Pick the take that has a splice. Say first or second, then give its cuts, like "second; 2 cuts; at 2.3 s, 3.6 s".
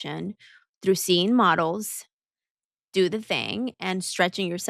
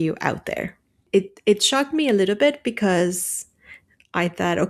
second; 1 cut; at 1.0 s